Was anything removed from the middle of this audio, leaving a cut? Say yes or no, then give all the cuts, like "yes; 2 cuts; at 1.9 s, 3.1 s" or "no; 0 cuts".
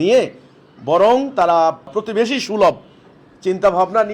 yes; 1 cut; at 1.9 s